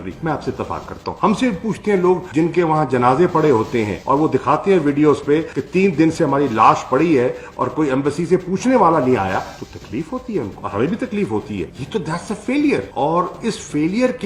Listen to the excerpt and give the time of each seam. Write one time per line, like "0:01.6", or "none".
0:01.1
0:10.6
0:11.7